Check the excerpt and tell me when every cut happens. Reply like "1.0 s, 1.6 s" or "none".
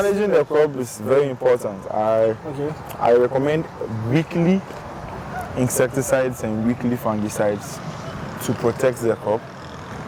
none